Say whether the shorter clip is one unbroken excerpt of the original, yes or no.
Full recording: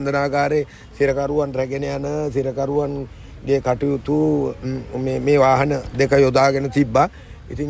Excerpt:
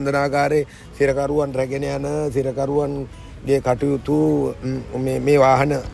yes